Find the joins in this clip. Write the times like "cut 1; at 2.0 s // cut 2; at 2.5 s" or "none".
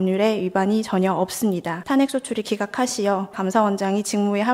cut 1; at 1.8 s // cut 2; at 3.4 s